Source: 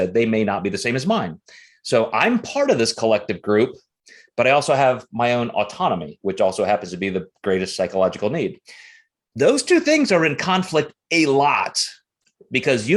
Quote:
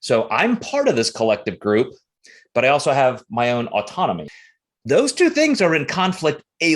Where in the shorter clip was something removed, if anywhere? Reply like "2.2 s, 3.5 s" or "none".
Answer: 4.3 s